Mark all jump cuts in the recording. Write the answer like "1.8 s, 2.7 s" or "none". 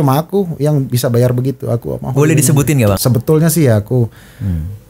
3.0 s